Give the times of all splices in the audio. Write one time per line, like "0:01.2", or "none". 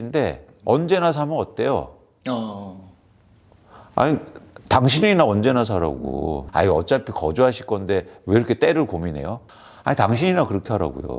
0:06.4
0:09.4